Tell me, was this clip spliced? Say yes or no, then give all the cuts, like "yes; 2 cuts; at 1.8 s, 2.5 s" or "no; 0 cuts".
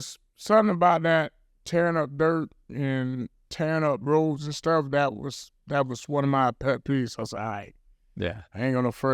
no; 0 cuts